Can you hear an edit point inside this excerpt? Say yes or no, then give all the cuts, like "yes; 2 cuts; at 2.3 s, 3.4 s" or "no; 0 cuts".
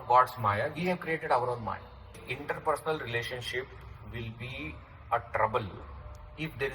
yes; 1 cut; at 2.2 s